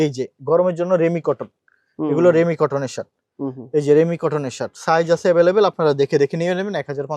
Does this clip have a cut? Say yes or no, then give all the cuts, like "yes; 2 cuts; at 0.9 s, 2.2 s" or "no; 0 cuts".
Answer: no; 0 cuts